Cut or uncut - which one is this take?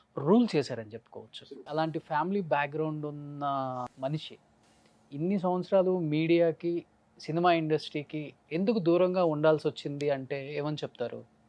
cut